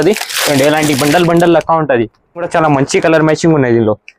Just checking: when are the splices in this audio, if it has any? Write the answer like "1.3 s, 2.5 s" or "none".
2.5 s